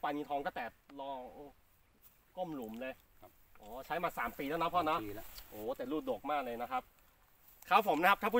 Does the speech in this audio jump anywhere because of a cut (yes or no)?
no